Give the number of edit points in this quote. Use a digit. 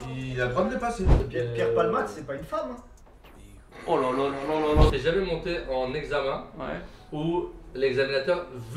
2